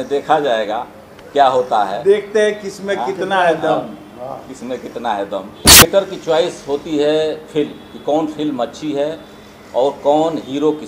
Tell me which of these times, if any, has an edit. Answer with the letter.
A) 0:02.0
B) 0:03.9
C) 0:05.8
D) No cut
C